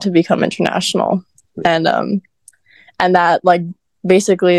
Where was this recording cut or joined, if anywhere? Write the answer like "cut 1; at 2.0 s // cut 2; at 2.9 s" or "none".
none